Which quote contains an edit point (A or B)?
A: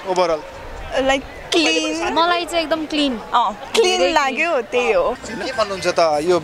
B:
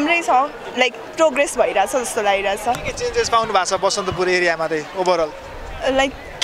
A